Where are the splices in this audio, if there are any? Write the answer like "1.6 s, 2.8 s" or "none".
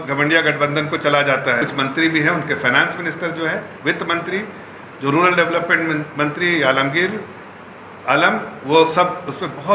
1.6 s